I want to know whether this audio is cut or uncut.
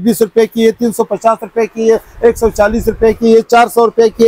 uncut